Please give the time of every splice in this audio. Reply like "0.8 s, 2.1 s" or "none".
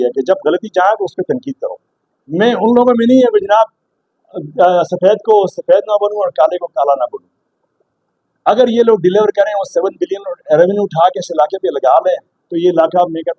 none